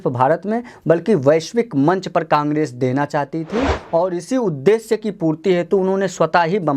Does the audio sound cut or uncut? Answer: uncut